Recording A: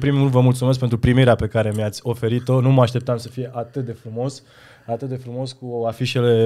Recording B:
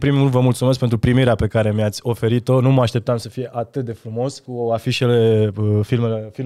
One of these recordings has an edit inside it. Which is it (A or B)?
B